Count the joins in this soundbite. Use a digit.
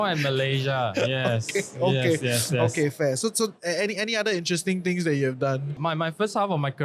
0